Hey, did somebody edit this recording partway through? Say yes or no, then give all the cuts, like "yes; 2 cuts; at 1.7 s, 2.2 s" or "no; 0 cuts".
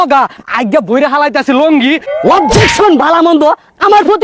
yes; 1 cut; at 2.1 s